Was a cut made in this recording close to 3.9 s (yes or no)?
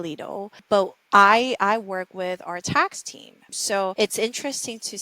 yes